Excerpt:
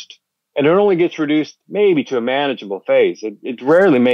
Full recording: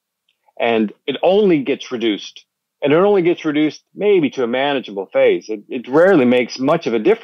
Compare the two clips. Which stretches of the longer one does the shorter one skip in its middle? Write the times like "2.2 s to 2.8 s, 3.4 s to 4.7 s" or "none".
none